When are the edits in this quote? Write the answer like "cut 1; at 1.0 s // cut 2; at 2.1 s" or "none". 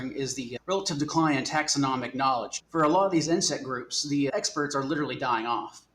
cut 1; at 2.6 s // cut 2; at 4.3 s